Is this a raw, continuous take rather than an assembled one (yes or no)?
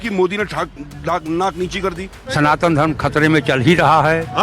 no